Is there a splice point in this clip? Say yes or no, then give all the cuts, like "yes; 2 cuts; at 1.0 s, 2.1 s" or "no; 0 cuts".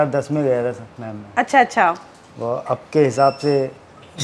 no; 0 cuts